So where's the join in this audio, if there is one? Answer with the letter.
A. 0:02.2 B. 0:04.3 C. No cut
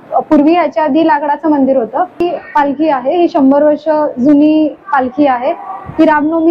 A